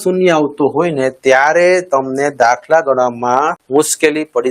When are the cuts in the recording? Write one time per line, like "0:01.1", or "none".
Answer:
0:03.6